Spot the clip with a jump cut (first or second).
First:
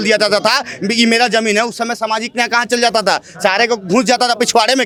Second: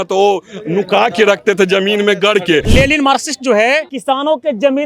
second